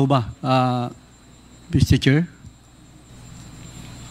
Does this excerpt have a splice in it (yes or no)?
yes